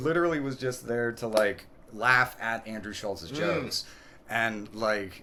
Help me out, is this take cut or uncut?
uncut